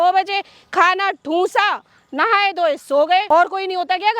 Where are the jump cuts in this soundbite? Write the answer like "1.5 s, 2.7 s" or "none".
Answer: 3.2 s